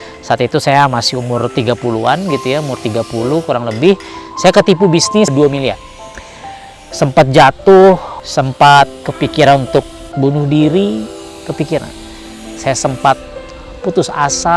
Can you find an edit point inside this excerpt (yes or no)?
no